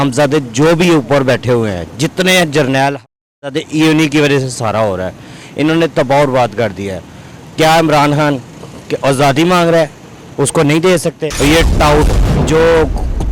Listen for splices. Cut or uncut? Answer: cut